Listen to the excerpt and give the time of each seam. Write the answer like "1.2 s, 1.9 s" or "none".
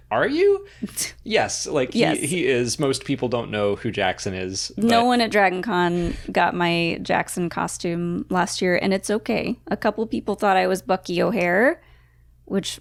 none